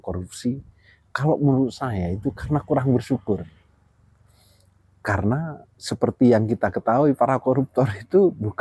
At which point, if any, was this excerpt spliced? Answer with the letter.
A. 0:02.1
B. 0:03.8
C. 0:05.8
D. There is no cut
C